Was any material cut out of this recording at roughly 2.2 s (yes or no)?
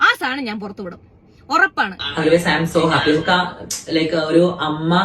yes